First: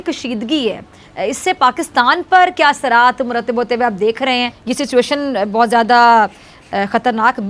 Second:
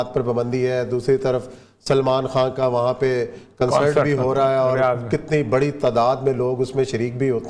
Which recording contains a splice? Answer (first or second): first